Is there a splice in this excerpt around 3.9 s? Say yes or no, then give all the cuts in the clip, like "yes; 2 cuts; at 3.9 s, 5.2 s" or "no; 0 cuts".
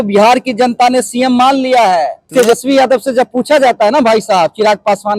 no; 1 cut; at 2.3 s